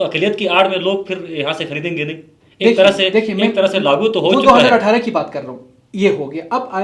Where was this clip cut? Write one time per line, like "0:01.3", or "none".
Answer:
none